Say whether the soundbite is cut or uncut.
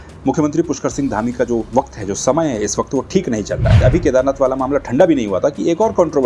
cut